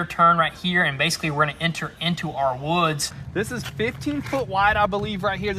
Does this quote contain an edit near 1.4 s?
no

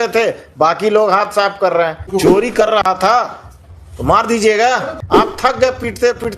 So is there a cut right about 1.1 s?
no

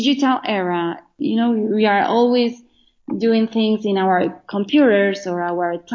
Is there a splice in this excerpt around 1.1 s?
yes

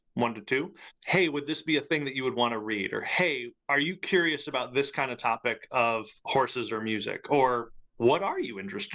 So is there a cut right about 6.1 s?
no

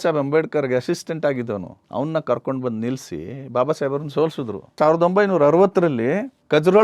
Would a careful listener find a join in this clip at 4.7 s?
yes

